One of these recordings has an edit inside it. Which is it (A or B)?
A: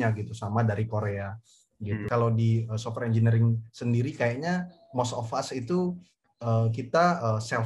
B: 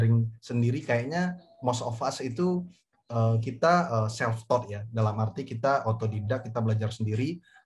A